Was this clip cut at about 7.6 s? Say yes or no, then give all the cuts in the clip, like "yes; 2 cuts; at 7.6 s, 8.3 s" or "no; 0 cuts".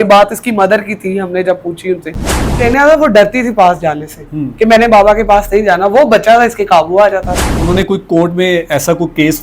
yes; 2 cuts; at 2.5 s, 7.6 s